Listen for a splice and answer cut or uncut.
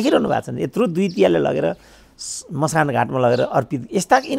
uncut